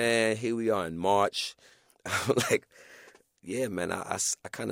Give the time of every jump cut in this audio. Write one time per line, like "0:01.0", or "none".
0:01.8